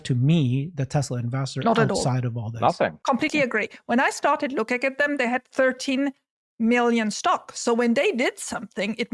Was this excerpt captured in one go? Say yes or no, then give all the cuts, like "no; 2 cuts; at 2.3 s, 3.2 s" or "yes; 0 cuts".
no; 1 cut; at 3.0 s